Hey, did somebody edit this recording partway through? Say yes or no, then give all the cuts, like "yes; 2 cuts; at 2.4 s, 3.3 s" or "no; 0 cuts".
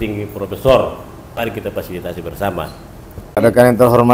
yes; 2 cuts; at 1.2 s, 3.4 s